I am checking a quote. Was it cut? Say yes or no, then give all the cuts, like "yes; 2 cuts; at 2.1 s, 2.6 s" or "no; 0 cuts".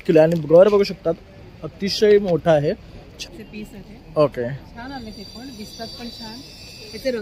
yes; 1 cut; at 3.1 s